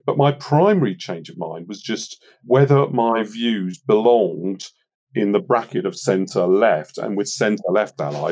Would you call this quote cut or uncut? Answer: uncut